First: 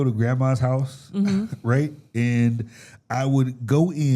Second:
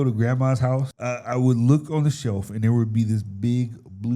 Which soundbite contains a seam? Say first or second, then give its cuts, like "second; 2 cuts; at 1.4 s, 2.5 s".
second; 1 cut; at 0.9 s